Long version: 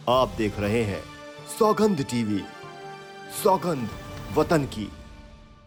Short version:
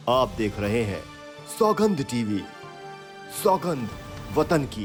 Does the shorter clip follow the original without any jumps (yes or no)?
yes